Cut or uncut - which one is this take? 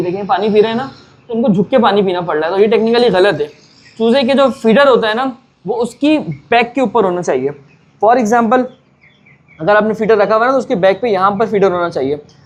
uncut